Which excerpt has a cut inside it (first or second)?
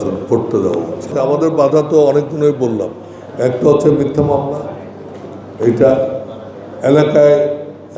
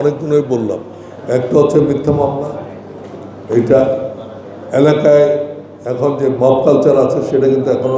first